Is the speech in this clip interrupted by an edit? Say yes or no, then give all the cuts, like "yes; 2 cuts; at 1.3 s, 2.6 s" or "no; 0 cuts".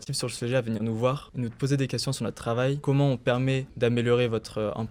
yes; 2 cuts; at 1.3 s, 3.7 s